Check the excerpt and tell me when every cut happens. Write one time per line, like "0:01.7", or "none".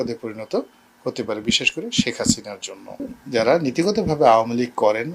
0:03.1